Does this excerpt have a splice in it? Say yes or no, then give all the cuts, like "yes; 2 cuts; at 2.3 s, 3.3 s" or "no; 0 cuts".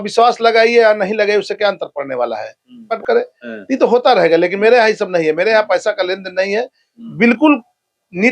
yes; 1 cut; at 2.9 s